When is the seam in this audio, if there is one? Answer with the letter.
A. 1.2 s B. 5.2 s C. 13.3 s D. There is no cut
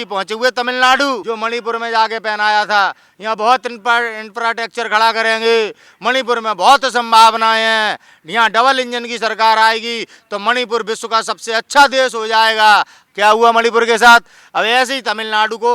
A